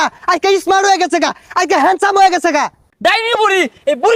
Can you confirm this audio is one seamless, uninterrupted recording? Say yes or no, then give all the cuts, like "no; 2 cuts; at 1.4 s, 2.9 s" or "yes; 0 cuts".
no; 1 cut; at 2.9 s